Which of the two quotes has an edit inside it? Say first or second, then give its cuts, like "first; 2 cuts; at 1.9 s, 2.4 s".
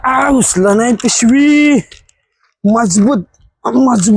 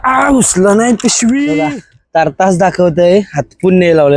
second; 1 cut; at 1.7 s